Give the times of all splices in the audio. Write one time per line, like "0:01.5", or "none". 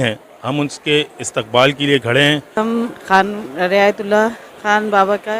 0:02.6